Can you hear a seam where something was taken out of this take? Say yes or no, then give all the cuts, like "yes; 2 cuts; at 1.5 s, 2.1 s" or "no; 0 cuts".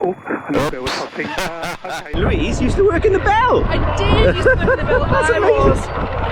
yes; 1 cut; at 2.1 s